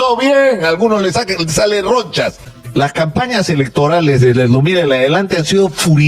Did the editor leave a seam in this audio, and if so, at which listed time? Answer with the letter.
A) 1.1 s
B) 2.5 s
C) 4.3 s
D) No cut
B